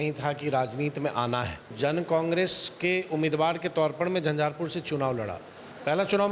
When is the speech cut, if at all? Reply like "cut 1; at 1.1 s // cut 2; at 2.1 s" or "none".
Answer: cut 1; at 1.7 s